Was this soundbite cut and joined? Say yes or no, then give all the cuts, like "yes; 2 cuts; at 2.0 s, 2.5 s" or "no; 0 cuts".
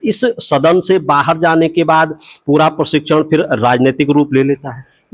no; 0 cuts